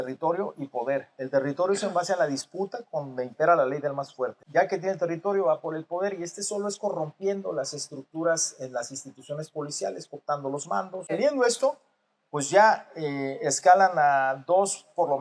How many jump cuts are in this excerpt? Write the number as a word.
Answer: two